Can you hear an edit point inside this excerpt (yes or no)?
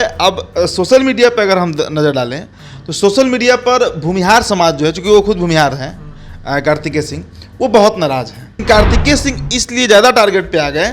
yes